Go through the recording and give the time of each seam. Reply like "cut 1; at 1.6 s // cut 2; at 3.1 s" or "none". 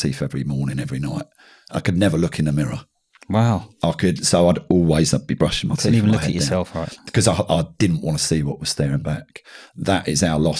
cut 1; at 7.5 s